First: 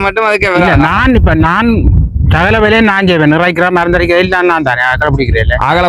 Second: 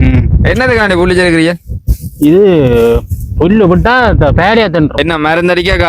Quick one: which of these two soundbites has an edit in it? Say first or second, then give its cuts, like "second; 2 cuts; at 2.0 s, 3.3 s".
second; 1 cut; at 4.9 s